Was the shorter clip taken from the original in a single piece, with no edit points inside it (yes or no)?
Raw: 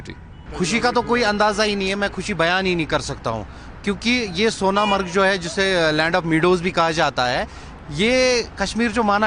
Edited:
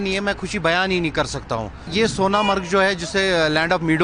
no